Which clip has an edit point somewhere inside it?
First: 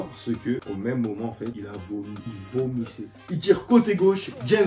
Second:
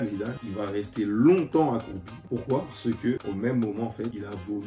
first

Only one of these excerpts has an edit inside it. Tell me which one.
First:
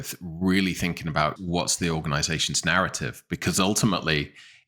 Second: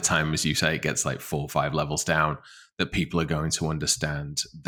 first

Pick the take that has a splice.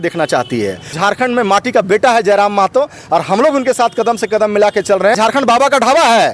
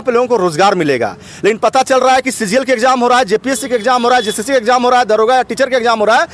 first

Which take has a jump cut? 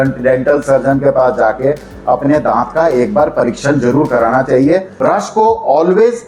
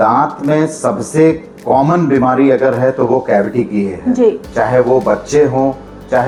first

